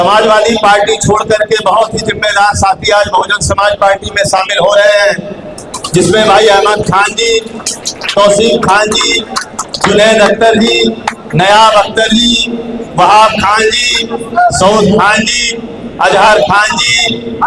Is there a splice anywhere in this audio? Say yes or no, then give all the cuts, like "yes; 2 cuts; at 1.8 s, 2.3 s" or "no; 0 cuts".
no; 0 cuts